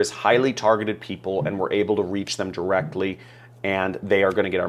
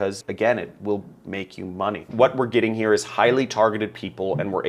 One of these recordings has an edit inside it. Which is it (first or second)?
second